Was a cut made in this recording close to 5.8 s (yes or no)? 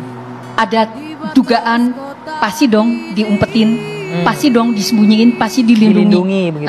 no